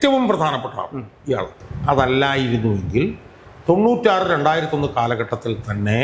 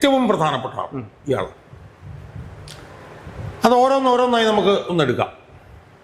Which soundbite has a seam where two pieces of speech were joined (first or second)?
first